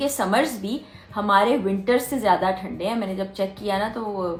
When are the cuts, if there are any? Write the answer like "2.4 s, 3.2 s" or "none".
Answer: none